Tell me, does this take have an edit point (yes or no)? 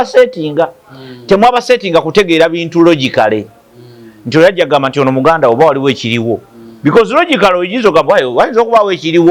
no